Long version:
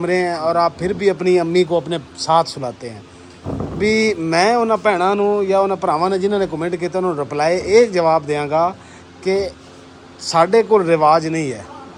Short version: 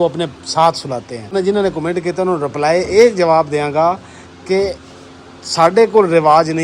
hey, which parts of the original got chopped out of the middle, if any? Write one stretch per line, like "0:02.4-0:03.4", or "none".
0:03.1-0:06.1